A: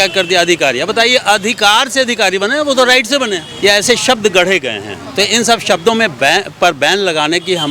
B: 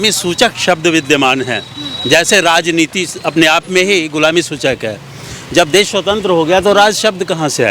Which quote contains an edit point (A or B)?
A